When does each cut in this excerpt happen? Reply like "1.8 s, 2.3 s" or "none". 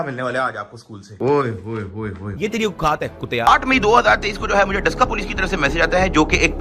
3.5 s

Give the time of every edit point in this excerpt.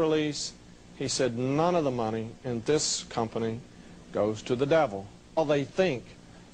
none

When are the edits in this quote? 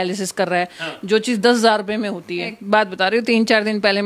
2.6 s

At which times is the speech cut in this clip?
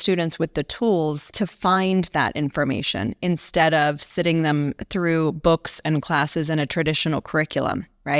1.2 s

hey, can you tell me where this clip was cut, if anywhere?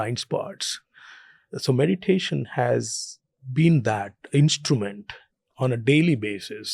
3.4 s

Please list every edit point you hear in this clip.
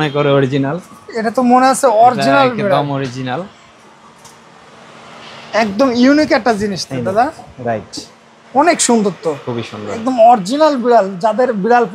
none

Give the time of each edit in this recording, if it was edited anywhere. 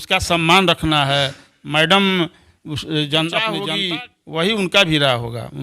3.6 s

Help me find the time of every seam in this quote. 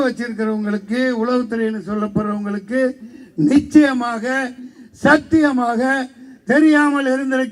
none

